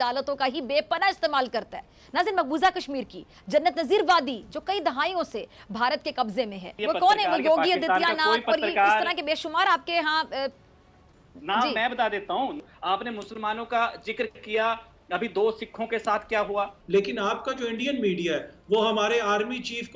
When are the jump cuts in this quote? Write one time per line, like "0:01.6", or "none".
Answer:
0:06.6
0:12.7
0:16.8